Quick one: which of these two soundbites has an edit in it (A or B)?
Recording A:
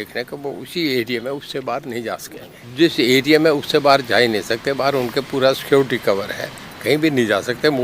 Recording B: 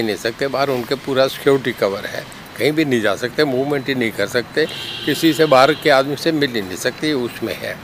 A